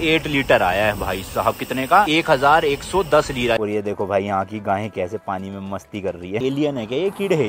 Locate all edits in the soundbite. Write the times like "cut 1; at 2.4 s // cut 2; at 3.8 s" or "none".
cut 1; at 2.1 s // cut 2; at 3.6 s // cut 3; at 6.4 s